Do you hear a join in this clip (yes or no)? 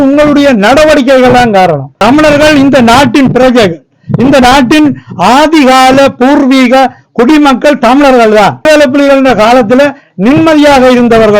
yes